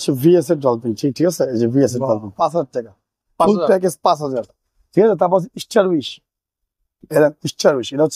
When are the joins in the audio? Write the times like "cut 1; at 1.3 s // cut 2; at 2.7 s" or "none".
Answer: none